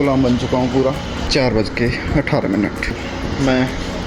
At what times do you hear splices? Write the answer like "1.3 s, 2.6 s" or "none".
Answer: 1.3 s, 3.0 s